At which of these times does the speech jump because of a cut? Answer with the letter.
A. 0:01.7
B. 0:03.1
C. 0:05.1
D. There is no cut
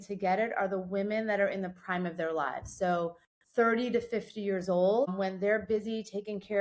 C